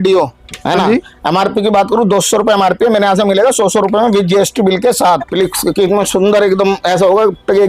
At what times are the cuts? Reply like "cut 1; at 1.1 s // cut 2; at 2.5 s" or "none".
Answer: cut 1; at 5.3 s